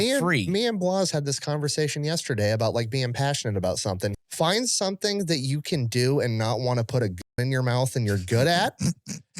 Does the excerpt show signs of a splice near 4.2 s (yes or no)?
yes